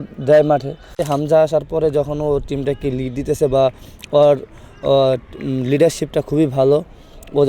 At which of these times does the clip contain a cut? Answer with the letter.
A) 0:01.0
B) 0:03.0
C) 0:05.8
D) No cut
A